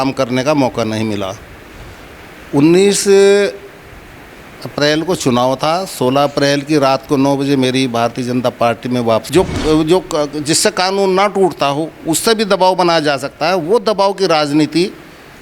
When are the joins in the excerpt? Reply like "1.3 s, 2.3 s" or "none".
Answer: 9.3 s